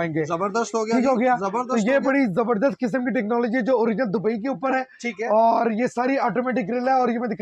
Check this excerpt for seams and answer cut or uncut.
uncut